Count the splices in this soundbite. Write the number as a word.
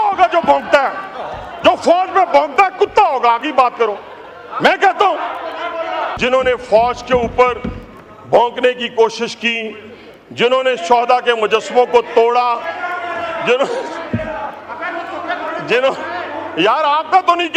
one